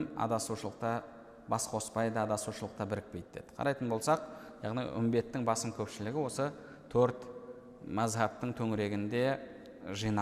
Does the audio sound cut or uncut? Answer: uncut